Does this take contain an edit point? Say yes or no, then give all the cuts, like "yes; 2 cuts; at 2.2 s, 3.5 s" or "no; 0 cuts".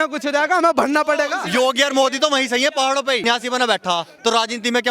yes; 2 cuts; at 1.4 s, 3.2 s